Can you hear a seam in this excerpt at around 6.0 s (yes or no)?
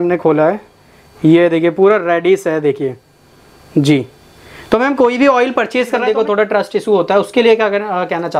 yes